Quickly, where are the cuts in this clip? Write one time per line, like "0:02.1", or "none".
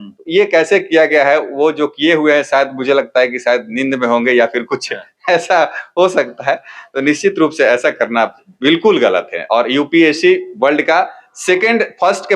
none

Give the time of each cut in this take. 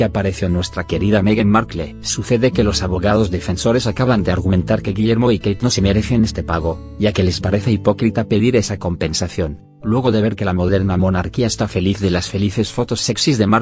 0:11.8

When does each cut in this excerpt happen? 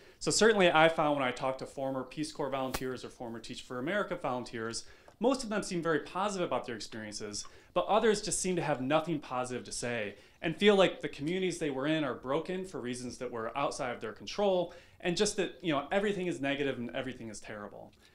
0:07.6

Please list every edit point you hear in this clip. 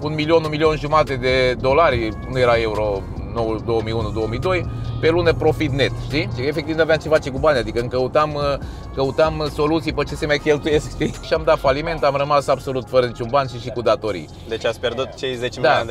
0:06.4
0:11.2

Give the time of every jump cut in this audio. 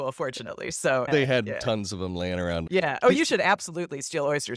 0:01.1
0:02.6

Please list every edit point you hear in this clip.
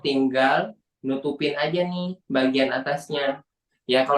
none

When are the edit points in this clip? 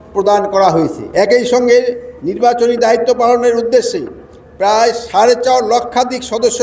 0:01.0

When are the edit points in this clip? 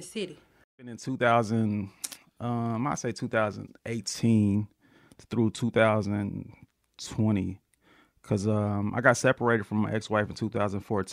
0:00.9

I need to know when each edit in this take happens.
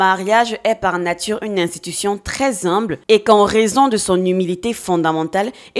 none

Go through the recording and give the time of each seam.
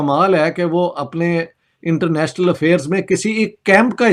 none

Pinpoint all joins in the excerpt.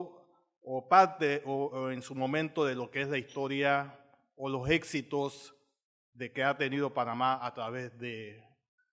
none

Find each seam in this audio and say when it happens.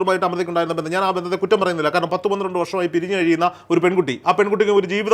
none

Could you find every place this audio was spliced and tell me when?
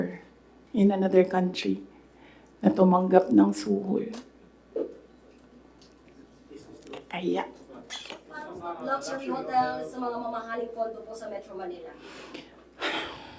0:08.4

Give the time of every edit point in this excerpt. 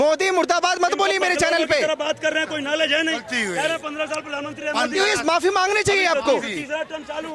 none

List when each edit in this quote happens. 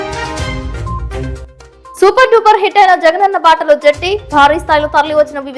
0:01.4

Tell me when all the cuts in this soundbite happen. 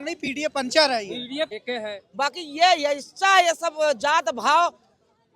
0:01.5

